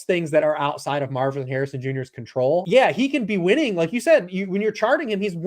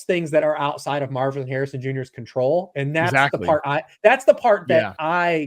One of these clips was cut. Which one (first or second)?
first